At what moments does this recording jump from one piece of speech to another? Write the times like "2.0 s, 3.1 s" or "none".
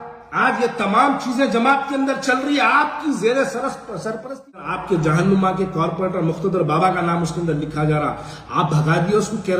4.7 s